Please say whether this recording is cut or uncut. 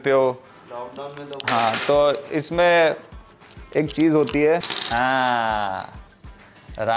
cut